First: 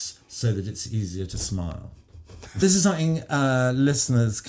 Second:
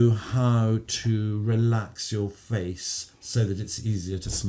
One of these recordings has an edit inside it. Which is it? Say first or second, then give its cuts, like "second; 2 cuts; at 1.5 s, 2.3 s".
first; 1 cut; at 2.6 s